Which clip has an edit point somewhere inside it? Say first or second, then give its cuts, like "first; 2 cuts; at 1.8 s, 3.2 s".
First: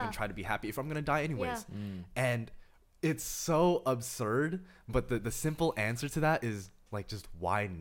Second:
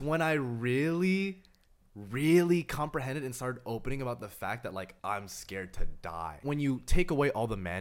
second; 2 cuts; at 4.9 s, 6.4 s